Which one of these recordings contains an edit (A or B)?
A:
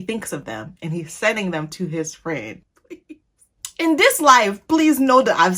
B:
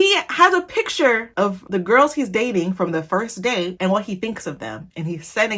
A